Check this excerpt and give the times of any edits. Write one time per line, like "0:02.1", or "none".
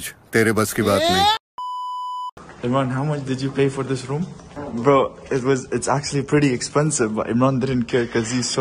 0:02.3
0:04.5